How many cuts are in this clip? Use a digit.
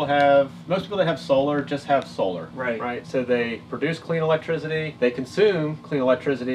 2